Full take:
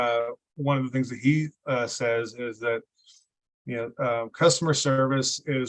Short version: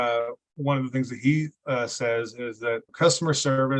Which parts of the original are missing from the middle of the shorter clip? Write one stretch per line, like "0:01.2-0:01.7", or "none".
0:02.9-0:04.3